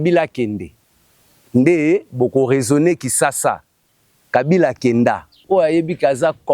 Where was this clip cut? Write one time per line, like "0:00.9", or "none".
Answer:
0:05.3